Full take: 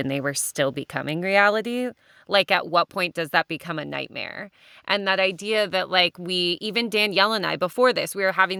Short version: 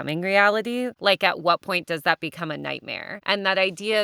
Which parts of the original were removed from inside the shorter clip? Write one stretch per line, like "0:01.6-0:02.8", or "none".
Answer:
0:01.9-0:02.2
0:04.3-0:04.7